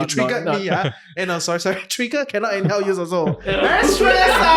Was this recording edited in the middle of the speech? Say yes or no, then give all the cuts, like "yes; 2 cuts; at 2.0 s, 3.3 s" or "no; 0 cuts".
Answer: no; 0 cuts